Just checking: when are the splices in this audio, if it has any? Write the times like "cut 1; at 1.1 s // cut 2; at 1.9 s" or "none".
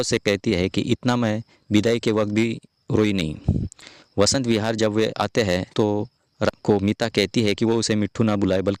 none